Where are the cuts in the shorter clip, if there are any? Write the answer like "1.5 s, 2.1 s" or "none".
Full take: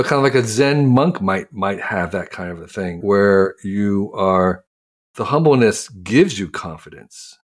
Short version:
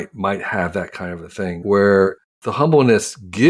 2.2 s